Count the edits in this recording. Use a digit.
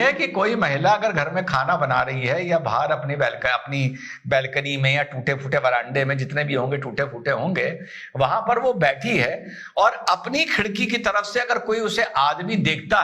0